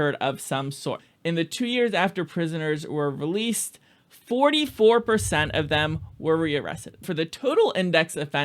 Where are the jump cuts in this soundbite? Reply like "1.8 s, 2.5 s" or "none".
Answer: 1.1 s, 7.0 s